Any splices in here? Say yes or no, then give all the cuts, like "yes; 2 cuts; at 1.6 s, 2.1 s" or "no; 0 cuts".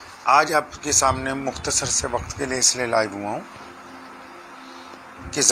no; 0 cuts